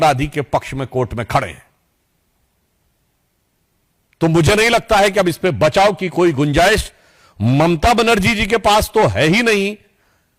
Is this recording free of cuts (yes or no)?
yes